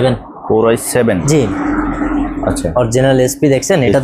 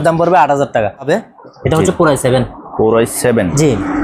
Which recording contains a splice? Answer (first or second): second